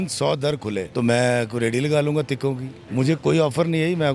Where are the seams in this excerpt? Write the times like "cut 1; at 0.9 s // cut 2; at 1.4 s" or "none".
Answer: cut 1; at 0.9 s // cut 2; at 2.7 s